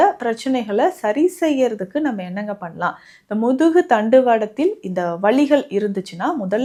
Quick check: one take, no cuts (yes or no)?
yes